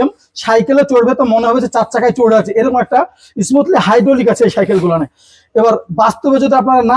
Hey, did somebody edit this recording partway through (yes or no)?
no